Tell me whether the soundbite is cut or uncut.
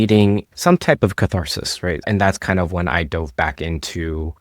cut